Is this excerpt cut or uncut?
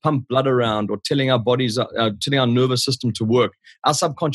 uncut